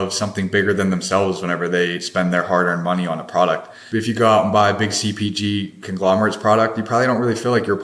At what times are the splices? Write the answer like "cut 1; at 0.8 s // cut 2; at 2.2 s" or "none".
cut 1; at 3.7 s